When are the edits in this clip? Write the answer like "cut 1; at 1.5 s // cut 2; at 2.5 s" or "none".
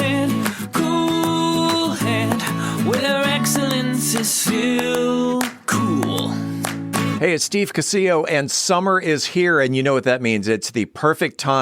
cut 1; at 7.1 s